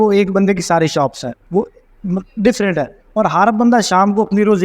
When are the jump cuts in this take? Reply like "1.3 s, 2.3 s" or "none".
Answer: 1.3 s